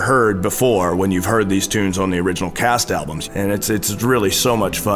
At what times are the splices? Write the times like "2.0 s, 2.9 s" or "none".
3.2 s

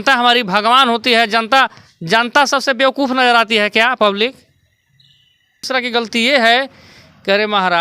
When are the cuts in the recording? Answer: 5.7 s

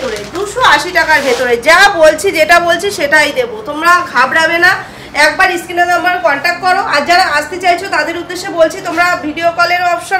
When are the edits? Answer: none

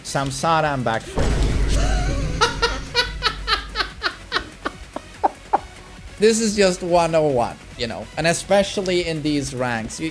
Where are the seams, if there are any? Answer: 6.2 s

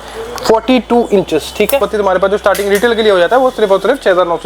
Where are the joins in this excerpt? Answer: 1.9 s

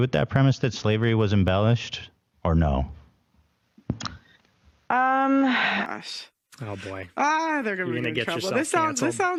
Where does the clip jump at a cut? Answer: none

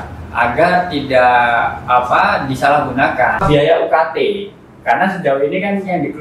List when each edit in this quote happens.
3.4 s

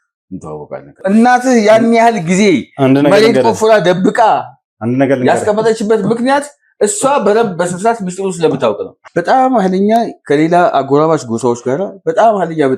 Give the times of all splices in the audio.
0.9 s, 8.9 s

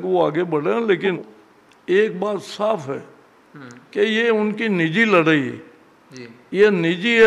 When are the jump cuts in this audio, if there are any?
1.0 s

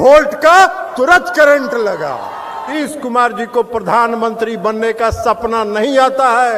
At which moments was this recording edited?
2.7 s

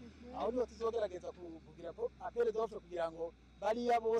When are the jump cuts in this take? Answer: none

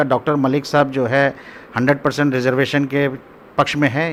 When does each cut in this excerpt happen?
none

